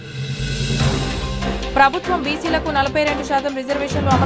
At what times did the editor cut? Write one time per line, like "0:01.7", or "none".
0:01.3